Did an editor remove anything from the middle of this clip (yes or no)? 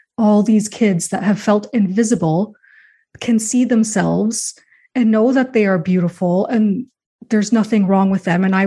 no